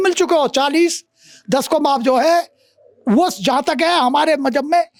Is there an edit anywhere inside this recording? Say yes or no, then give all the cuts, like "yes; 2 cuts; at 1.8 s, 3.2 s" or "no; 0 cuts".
no; 0 cuts